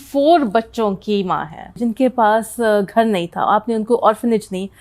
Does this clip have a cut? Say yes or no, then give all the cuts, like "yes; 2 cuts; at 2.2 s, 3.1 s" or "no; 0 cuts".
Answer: yes; 1 cut; at 1.7 s